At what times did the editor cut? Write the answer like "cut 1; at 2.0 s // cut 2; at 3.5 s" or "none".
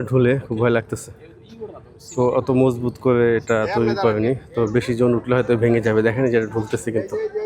none